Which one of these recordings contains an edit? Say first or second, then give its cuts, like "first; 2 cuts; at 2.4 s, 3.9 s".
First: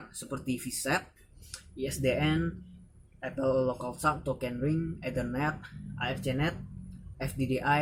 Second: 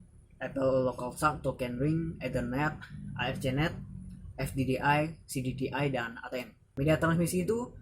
second; 1 cut; at 6.7 s